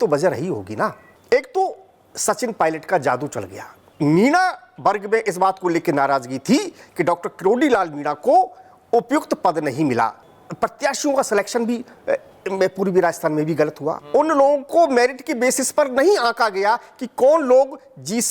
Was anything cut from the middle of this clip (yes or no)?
yes